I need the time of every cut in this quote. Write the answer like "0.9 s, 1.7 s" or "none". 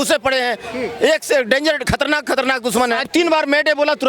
3.1 s